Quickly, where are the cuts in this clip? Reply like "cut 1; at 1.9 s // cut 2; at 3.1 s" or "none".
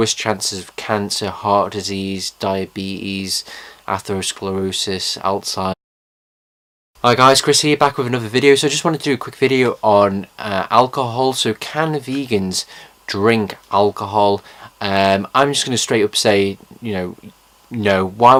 none